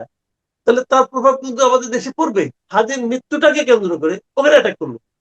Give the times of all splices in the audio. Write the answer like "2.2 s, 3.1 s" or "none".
2.6 s